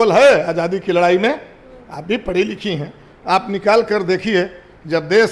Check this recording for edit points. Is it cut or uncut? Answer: uncut